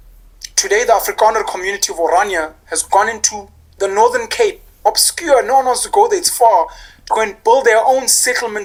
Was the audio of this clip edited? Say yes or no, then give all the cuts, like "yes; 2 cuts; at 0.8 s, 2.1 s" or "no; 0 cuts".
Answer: no; 0 cuts